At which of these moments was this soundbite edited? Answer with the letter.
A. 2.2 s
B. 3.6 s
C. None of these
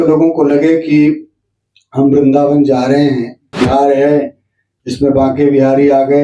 B